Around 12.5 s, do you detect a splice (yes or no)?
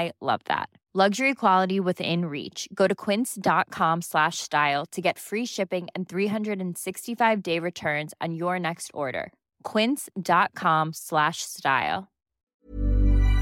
yes